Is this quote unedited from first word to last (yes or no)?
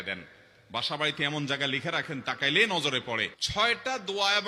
no